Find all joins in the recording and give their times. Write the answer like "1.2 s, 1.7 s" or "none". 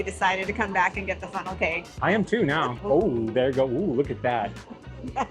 2.8 s